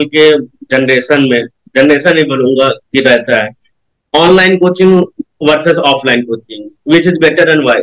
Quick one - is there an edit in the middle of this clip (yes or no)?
no